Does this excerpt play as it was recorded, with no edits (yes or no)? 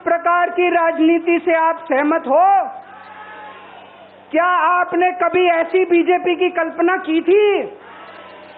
yes